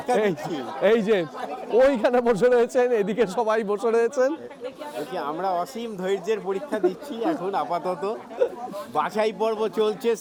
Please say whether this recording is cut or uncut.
uncut